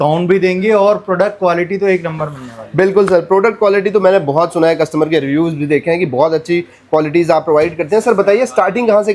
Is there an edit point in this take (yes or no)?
no